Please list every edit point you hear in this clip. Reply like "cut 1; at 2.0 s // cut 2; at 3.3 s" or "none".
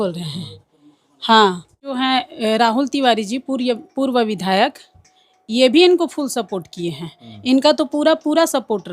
cut 1; at 2.0 s